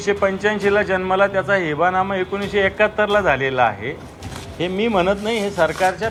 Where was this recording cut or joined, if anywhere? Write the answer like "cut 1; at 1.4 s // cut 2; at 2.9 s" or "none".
none